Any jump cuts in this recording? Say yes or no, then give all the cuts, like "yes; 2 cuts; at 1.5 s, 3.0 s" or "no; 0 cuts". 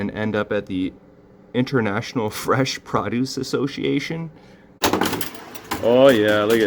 yes; 1 cut; at 4.8 s